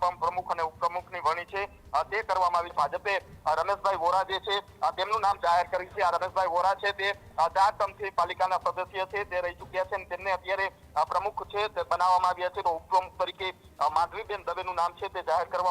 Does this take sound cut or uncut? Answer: cut